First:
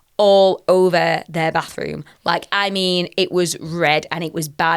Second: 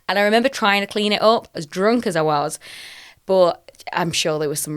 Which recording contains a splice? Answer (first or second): second